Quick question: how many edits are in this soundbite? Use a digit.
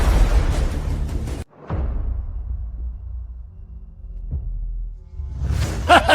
1